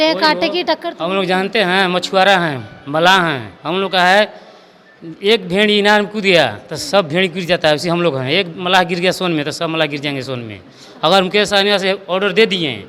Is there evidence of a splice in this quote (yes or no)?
no